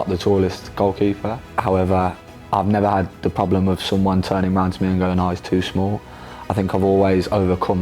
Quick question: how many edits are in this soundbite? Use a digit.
0